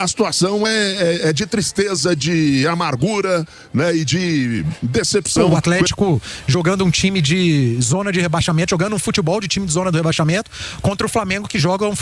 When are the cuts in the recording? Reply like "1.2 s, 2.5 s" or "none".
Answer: 5.4 s